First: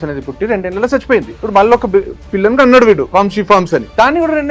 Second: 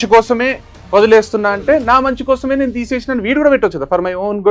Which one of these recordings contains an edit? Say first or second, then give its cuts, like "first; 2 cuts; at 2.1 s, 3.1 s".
first; 3 cuts; at 1.4 s, 2.2 s, 3.4 s